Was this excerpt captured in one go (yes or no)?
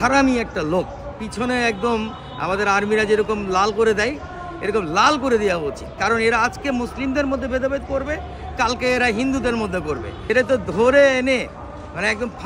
no